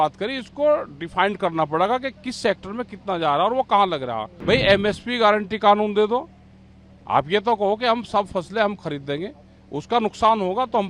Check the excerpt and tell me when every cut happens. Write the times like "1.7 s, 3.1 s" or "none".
4.3 s